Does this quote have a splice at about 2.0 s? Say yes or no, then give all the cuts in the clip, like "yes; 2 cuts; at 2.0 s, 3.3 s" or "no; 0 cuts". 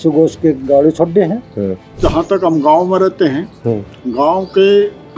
yes; 1 cut; at 2.0 s